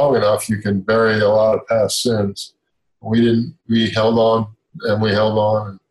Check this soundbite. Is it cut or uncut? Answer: uncut